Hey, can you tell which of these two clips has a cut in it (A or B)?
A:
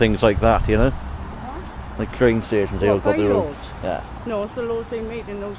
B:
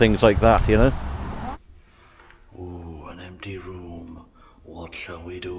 B